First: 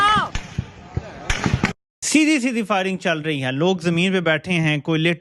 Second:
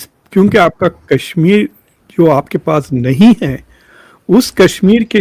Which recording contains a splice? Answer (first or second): first